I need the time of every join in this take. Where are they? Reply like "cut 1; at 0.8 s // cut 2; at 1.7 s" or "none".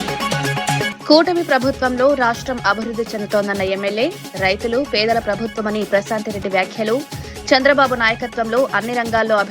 cut 1; at 0.9 s